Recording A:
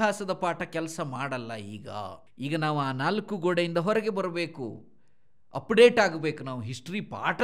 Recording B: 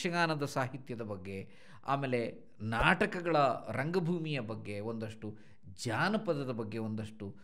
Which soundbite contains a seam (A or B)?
A